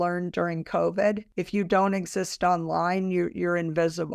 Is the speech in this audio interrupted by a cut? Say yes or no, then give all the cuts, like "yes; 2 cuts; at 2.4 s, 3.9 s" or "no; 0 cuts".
yes; 1 cut; at 1.3 s